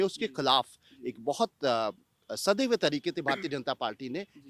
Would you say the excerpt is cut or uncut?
uncut